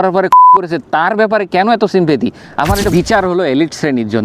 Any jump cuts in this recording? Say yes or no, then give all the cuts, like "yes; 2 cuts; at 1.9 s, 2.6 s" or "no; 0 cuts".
yes; 1 cut; at 2.8 s